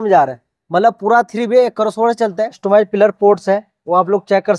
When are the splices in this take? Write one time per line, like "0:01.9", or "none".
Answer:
0:02.6